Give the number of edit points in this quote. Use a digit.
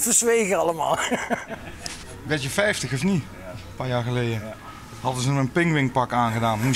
0